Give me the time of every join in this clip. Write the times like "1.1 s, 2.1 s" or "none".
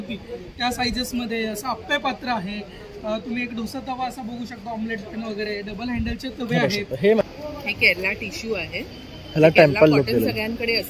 7.2 s